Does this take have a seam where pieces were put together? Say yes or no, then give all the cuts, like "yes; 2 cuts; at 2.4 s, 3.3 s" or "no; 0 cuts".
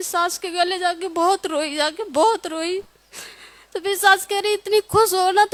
no; 0 cuts